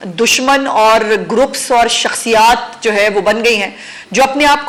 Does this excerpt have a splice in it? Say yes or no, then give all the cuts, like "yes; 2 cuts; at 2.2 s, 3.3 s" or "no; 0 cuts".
no; 0 cuts